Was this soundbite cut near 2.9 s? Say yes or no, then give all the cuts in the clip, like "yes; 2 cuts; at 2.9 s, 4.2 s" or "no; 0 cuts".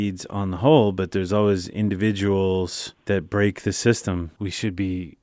yes; 2 cuts; at 2.9 s, 4.3 s